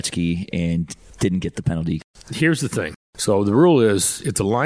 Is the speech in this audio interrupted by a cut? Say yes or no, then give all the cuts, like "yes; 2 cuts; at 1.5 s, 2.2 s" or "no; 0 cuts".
yes; 3 cuts; at 1.0 s, 2.0 s, 3.0 s